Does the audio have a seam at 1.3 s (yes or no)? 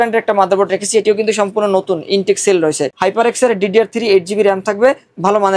no